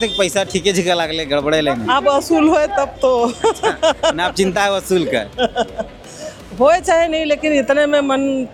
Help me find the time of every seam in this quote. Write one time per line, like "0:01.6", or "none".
none